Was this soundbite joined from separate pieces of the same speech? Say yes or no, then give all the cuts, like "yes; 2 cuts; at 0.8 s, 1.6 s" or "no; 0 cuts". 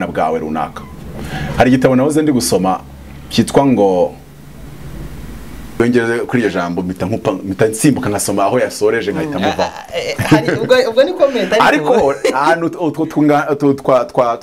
yes; 1 cut; at 5.8 s